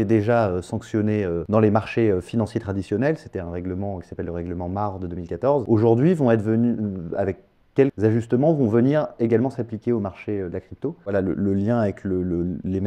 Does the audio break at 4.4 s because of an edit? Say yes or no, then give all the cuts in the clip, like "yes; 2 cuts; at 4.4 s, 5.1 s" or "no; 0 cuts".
no; 4 cuts; at 1.4 s, 5.6 s, 7.9 s, 11.1 s